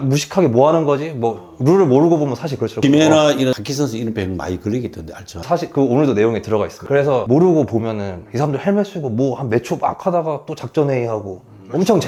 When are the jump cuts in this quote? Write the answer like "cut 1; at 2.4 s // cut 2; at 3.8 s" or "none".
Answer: none